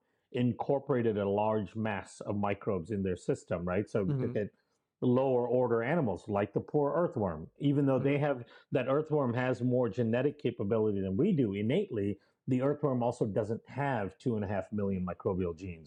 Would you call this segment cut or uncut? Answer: uncut